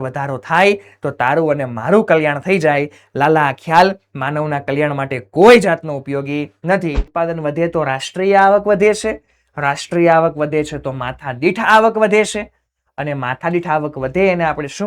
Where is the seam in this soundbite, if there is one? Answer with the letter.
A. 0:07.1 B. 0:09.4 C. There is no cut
A